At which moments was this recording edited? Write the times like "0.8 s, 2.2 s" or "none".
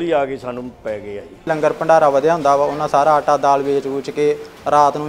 1.5 s